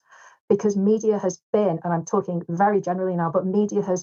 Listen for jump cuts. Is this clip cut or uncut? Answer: uncut